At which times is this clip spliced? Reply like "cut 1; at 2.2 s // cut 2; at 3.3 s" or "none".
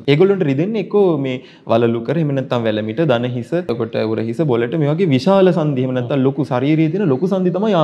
cut 1; at 3.7 s